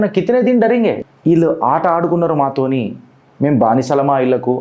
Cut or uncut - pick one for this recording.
cut